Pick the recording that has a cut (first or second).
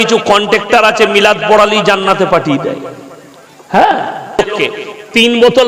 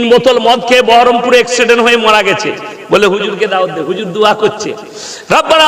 first